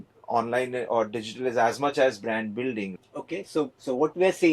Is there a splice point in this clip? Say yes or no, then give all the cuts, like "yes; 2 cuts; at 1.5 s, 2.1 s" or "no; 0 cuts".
yes; 1 cut; at 2.9 s